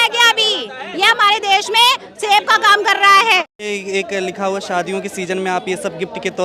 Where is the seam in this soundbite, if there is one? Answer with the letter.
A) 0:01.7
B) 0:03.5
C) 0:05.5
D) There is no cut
B